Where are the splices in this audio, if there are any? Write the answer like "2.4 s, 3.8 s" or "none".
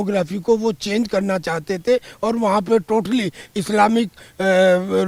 none